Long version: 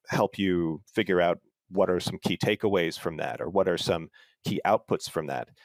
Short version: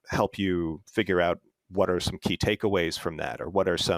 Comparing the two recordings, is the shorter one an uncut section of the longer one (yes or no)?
yes